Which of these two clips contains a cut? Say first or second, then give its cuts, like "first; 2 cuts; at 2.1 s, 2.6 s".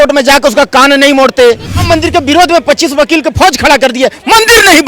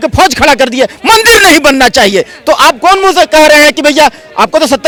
first; 1 cut; at 1.8 s